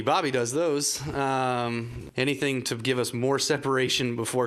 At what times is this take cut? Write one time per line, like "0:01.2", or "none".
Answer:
0:02.0